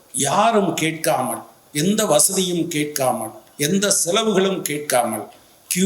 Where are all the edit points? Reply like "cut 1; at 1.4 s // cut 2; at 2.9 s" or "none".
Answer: none